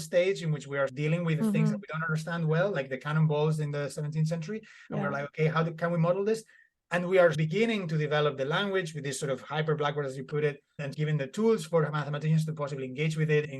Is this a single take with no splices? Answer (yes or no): no